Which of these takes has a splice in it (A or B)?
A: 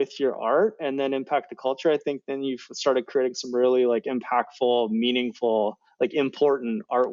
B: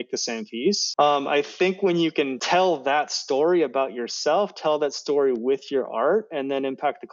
B